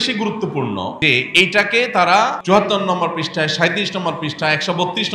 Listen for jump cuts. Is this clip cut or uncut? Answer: cut